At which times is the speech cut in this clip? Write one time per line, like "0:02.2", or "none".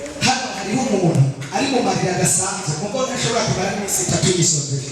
none